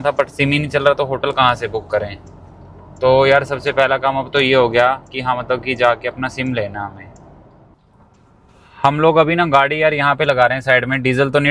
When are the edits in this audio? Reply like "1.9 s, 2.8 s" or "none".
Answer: none